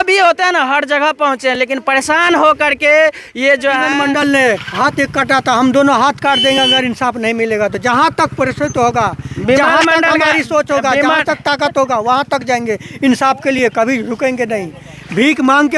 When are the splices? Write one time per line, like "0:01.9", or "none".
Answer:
0:03.9